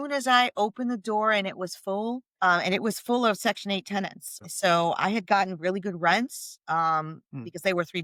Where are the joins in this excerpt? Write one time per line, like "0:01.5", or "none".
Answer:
none

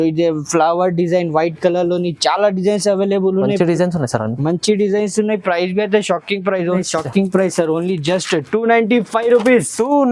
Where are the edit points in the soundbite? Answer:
0:06.8

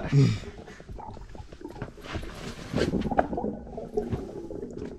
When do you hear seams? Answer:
none

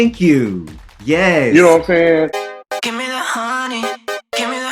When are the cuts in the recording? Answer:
0:02.4

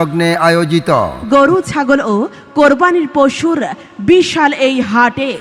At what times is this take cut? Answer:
0:01.1

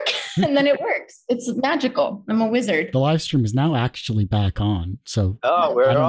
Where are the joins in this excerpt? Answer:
0:02.9

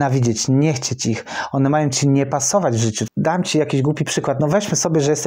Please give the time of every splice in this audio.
0:03.1

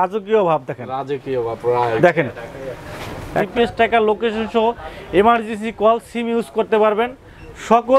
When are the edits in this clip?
0:03.4

